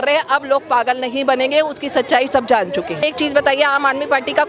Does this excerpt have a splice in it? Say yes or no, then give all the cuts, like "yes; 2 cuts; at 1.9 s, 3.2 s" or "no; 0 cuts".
yes; 1 cut; at 3.0 s